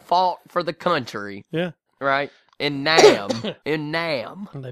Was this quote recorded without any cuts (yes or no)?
no